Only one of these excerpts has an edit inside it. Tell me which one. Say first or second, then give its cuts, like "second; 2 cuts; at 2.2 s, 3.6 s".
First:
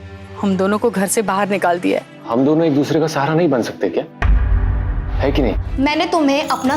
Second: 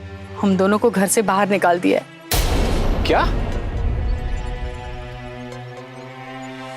first; 2 cuts; at 2.1 s, 5.6 s